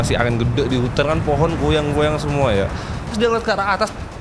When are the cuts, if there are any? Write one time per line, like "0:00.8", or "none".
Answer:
0:03.1